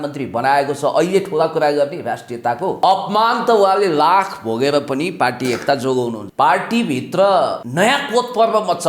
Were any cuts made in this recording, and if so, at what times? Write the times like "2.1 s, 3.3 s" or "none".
2.8 s, 6.2 s, 7.6 s